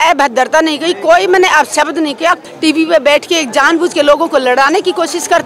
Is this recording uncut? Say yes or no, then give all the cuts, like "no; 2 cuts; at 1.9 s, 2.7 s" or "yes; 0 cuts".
no; 1 cut; at 2.4 s